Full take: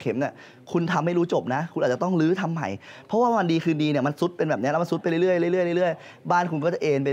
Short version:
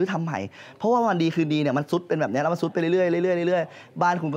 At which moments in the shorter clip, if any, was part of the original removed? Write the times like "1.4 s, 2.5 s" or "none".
none